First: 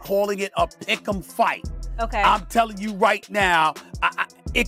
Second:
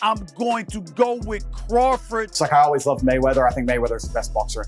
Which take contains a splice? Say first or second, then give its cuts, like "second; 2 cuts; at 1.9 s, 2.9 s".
second; 1 cut; at 2.4 s